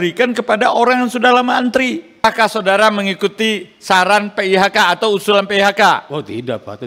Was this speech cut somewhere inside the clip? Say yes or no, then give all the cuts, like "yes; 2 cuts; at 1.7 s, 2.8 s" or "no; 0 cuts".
yes; 1 cut; at 2.2 s